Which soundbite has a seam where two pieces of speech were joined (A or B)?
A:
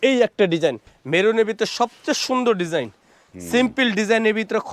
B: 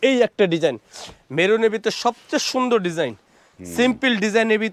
A